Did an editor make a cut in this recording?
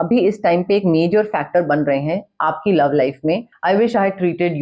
yes; 1 cut; at 3.5 s

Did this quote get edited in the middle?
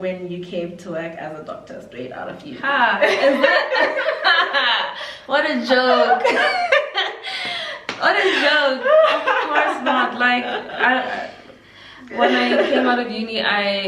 no; 0 cuts

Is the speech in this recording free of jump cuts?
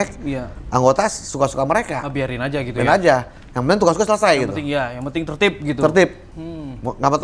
yes; 0 cuts

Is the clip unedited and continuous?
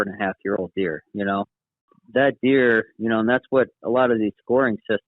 no; 1 cut; at 2.0 s

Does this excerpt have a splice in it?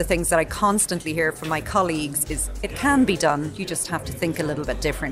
yes; 1 cut; at 2.3 s

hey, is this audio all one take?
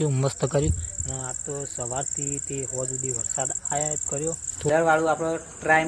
no; 1 cut; at 4.7 s

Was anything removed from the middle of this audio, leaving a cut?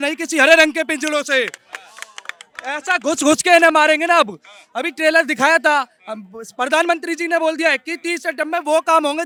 no; 0 cuts

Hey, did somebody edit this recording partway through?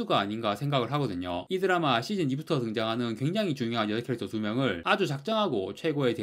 yes; 1 cut; at 1.4 s

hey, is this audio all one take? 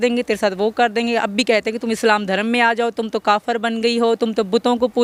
yes; 0 cuts

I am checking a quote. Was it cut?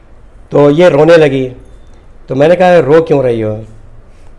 no; 0 cuts

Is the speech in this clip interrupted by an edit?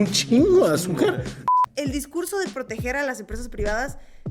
yes; 1 cut; at 1.5 s

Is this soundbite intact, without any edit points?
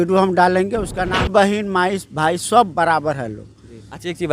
no; 1 cut; at 1.2 s

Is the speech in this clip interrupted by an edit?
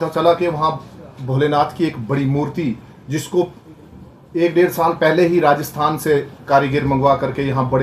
no; 0 cuts

